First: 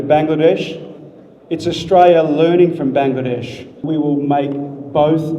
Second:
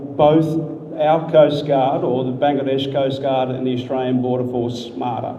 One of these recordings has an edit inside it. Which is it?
first; 1 cut; at 3.8 s

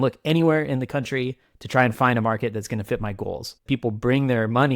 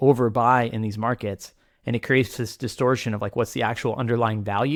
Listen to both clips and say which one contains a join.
first; 1 cut; at 3.6 s

